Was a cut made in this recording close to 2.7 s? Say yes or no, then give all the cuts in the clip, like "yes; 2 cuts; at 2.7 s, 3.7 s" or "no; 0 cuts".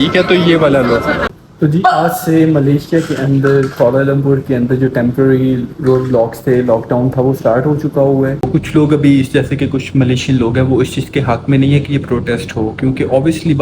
no; 2 cuts; at 1.2 s, 8.5 s